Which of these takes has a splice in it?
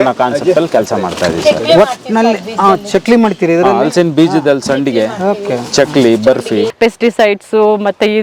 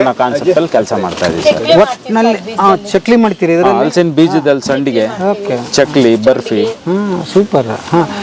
first; 1 cut; at 6.7 s

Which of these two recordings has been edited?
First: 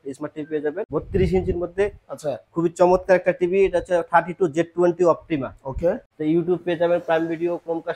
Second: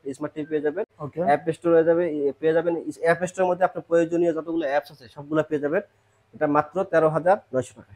first; 2 cuts; at 0.8 s, 6.1 s

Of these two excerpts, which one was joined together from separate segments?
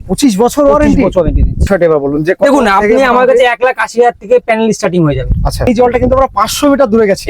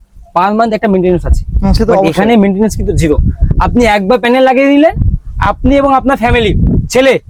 first; 2 cuts; at 1.7 s, 5.7 s

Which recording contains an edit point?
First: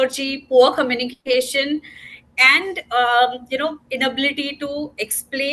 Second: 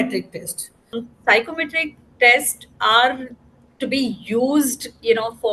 second; 1 cut; at 1.0 s

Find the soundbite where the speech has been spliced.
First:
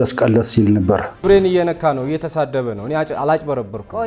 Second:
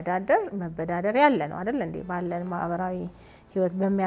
first; 1 cut; at 1.2 s

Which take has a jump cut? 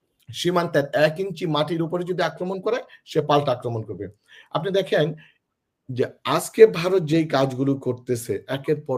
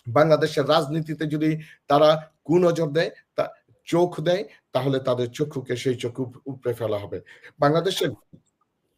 second; 1 cut; at 7.4 s

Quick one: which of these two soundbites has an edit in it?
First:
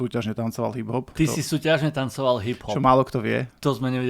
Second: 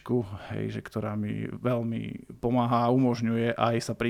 first; 1 cut; at 1.1 s

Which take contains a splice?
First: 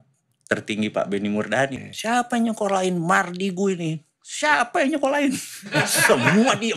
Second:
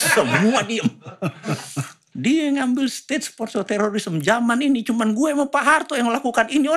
first; 1 cut; at 1.8 s

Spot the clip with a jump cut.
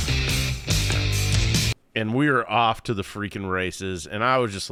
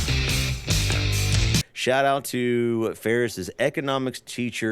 second; 1 cut; at 1.7 s

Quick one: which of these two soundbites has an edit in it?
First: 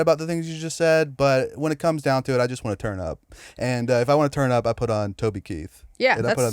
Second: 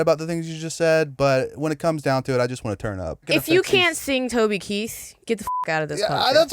second; 1 cut; at 3.3 s

